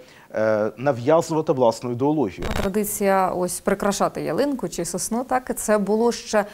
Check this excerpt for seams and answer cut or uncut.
cut